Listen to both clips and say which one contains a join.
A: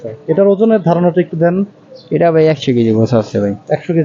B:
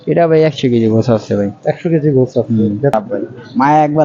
B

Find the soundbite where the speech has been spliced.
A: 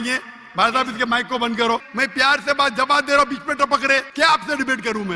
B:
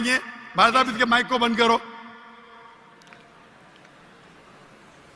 A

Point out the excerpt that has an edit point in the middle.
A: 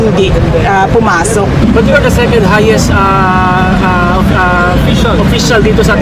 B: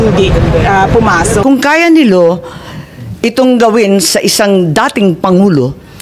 B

